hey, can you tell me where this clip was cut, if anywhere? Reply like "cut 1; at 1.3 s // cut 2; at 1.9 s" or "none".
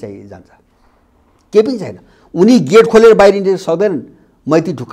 none